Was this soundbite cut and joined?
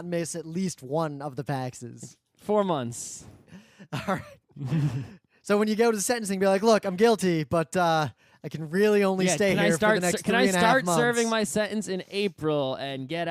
no; 0 cuts

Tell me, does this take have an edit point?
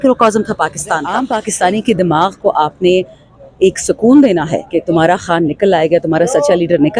yes; 1 cut; at 1.1 s

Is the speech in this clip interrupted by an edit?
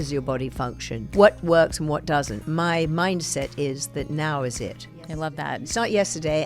yes; 3 cuts; at 0.9 s, 2.4 s, 5.2 s

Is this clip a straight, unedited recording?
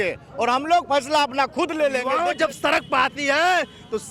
no; 1 cut; at 2.1 s

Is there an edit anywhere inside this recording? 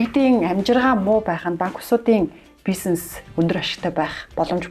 no; 0 cuts

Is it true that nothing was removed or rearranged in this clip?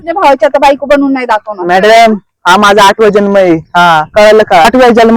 yes; 0 cuts

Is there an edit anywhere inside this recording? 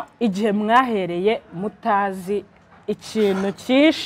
no; 0 cuts

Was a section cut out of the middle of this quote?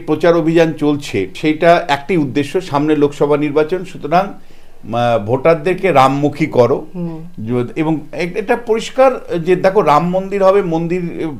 yes; 1 cut; at 1.3 s

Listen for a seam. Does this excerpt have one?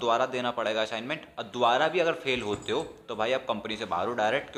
no; 0 cuts

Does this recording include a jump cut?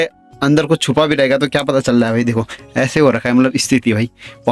no; 0 cuts

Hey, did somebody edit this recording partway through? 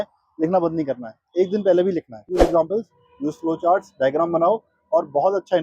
yes; 1 cut; at 2.4 s

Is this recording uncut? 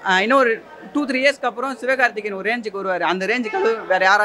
yes; 0 cuts

